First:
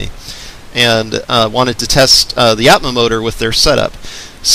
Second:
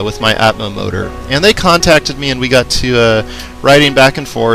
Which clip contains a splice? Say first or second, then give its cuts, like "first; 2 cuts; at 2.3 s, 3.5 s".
second; 1 cut; at 3.5 s